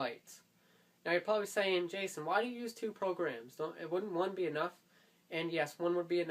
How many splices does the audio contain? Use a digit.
1